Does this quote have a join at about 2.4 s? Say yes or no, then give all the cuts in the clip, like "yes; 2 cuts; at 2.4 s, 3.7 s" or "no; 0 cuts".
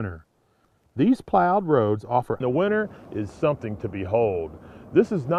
no; 0 cuts